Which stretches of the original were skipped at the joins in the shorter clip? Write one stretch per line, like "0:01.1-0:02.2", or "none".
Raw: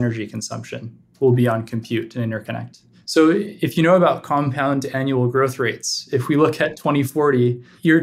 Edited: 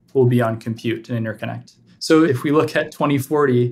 0:03.3-0:06.1